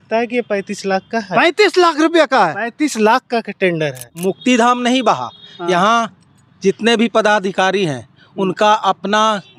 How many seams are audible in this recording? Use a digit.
1